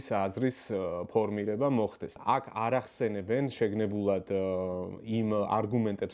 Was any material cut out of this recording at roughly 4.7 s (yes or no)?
no